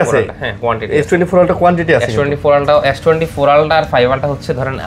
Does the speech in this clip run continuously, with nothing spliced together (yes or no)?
yes